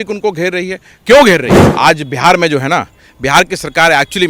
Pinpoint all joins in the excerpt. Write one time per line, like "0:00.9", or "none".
0:01.6